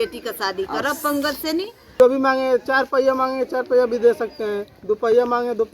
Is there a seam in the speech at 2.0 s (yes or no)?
yes